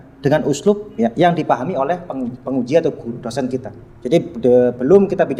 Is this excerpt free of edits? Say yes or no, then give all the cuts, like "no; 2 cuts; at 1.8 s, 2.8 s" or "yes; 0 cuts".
yes; 0 cuts